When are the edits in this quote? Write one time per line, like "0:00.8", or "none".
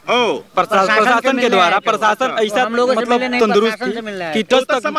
none